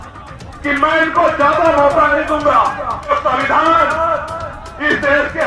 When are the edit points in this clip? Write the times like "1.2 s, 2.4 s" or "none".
3.1 s